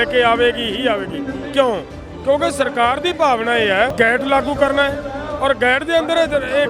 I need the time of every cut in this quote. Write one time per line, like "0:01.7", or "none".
0:03.9